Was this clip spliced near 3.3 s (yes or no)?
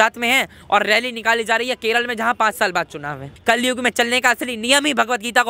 yes